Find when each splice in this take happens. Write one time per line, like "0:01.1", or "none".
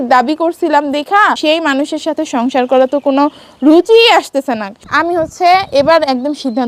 0:01.4
0:04.8